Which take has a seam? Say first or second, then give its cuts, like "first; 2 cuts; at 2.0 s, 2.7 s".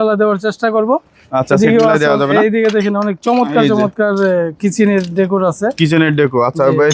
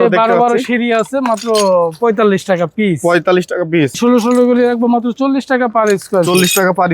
second; 1 cut; at 4.0 s